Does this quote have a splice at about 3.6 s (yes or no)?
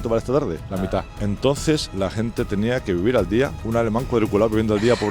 yes